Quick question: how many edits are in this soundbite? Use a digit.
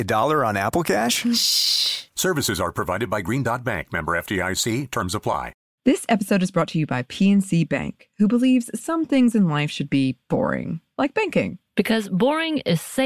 1